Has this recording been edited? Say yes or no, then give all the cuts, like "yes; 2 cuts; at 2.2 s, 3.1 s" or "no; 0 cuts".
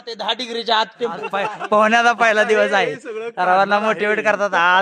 yes; 1 cut; at 1.5 s